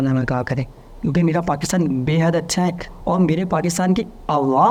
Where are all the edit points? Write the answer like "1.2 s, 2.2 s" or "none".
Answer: none